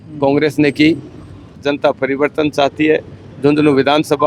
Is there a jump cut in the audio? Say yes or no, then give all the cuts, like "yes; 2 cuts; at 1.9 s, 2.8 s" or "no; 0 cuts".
yes; 1 cut; at 1.6 s